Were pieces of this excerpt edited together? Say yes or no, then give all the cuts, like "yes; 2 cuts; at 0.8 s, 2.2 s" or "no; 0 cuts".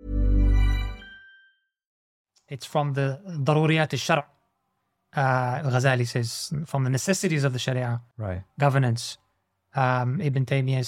yes; 1 cut; at 2.0 s